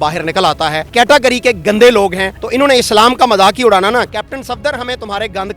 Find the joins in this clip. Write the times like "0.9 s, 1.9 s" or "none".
0.8 s, 4.2 s